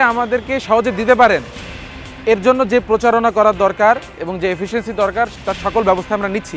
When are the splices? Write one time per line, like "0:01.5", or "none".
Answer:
none